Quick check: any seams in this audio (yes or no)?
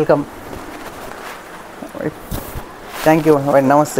no